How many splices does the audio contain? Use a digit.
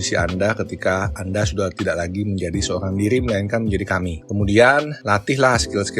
2